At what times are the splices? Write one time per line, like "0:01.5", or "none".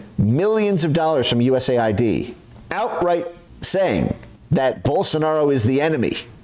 none